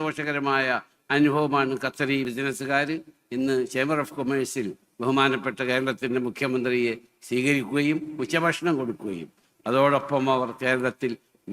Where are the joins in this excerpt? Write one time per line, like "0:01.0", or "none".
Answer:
0:02.3